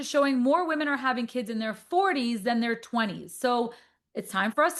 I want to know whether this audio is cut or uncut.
uncut